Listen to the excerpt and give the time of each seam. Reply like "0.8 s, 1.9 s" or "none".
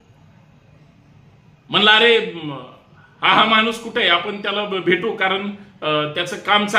none